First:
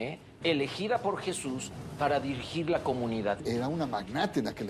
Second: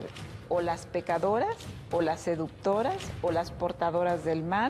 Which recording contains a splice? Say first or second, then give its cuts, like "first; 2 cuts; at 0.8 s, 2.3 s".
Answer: first; 1 cut; at 3.4 s